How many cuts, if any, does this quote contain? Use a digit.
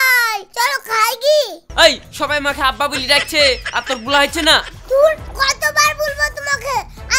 1